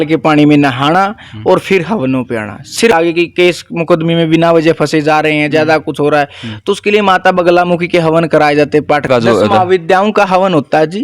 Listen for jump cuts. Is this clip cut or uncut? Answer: cut